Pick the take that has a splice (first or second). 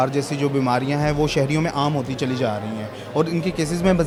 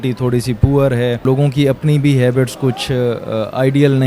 second